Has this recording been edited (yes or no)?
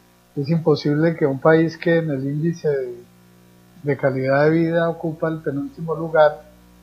yes